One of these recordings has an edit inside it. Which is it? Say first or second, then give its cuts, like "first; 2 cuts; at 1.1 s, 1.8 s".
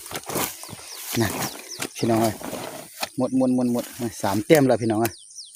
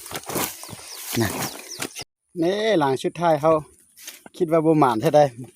second; 1 cut; at 1.9 s